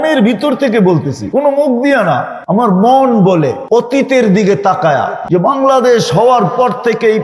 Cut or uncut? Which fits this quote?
cut